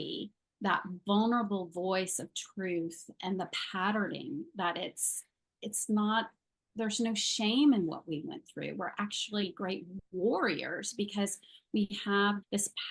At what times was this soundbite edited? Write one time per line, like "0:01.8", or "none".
none